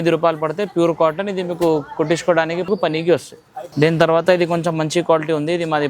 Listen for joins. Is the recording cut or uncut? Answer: uncut